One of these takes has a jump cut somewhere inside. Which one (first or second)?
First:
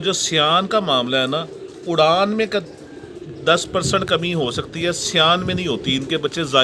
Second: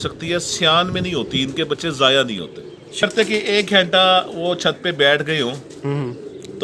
second